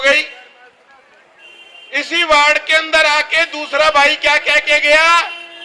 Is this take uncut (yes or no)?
yes